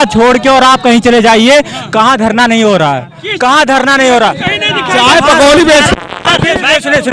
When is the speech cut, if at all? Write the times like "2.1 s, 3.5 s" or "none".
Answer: none